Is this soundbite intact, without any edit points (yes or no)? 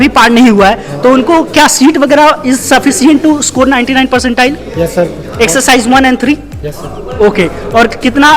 yes